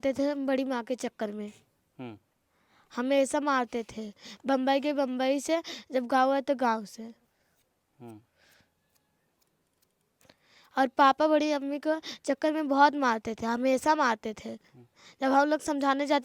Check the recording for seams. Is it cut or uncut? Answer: uncut